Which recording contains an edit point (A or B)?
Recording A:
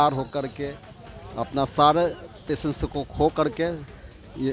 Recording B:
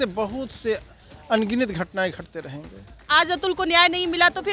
B